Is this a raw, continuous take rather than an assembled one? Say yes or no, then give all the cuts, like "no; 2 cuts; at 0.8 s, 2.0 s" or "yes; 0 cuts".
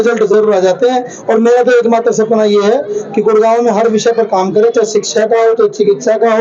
yes; 0 cuts